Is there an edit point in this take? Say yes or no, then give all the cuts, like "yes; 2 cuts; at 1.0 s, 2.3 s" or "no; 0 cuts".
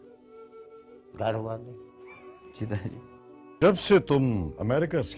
yes; 1 cut; at 3.4 s